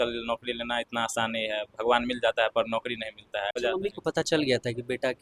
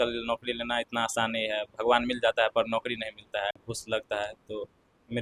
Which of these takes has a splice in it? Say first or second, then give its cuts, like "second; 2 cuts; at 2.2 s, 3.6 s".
first; 1 cut; at 3.6 s